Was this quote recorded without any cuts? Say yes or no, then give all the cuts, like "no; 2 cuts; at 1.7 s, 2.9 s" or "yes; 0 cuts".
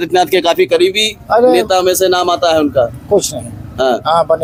yes; 0 cuts